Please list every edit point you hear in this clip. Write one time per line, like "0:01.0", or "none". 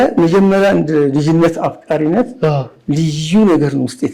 none